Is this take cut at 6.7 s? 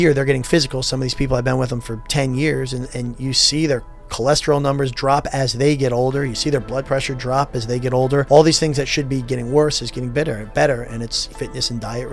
no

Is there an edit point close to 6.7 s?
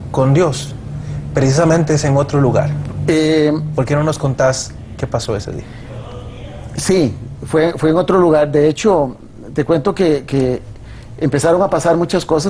no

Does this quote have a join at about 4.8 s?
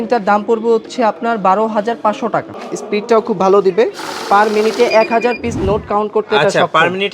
no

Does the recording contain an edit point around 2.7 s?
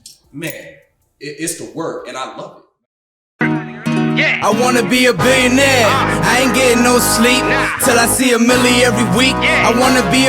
yes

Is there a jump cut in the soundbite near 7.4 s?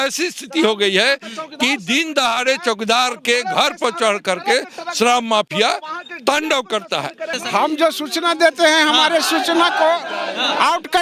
yes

